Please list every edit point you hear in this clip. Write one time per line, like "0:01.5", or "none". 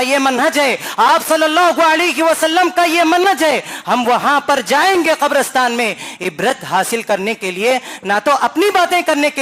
none